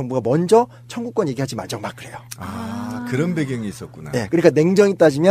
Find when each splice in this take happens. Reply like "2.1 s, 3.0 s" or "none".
3.3 s

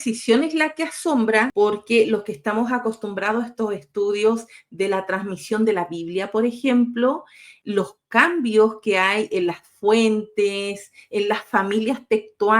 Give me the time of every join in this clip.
1.5 s, 7.5 s

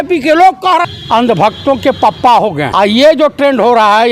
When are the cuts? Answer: 0.8 s, 2.7 s

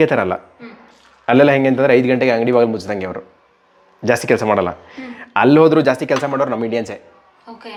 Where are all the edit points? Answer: none

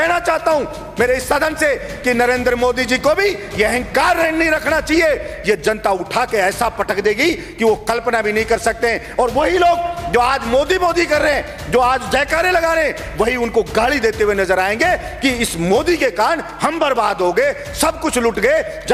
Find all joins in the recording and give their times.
none

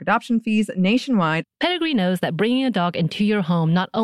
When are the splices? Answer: 1.5 s

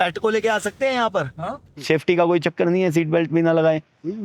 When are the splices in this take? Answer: 1.7 s

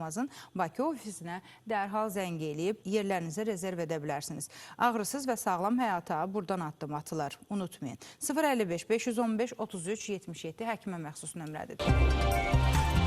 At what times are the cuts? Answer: 11.7 s

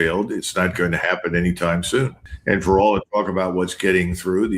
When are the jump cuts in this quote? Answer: 2.2 s

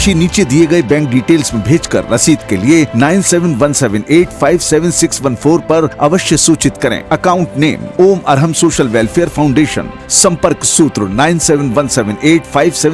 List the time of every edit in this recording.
none

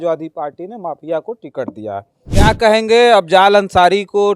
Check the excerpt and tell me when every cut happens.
2.2 s

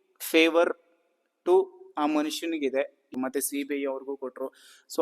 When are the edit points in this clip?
3.1 s

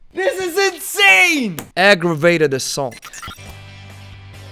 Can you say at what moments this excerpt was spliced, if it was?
1.6 s, 3.0 s

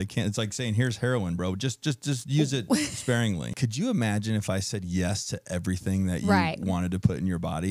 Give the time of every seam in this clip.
3.6 s

